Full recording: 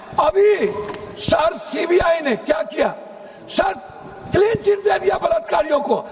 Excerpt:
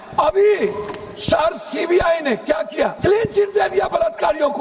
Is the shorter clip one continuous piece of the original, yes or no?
no